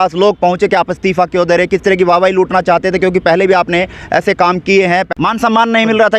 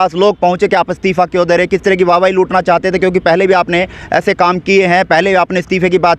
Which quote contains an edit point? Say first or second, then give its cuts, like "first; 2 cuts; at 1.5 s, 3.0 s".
first; 1 cut; at 5.1 s